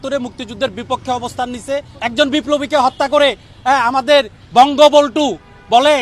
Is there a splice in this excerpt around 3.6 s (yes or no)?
no